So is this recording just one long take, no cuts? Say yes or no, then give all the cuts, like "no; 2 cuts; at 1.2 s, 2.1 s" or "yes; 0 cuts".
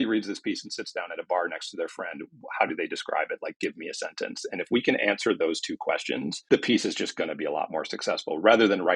yes; 0 cuts